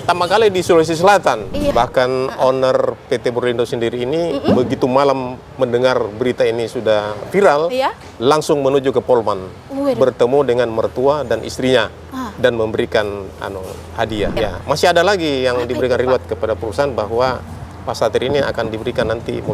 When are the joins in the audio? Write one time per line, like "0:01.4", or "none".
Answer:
0:01.7
0:14.3